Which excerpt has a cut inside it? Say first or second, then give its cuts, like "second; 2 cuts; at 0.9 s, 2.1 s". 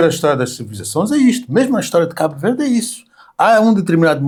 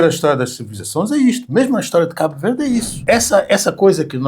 second; 1 cut; at 3.0 s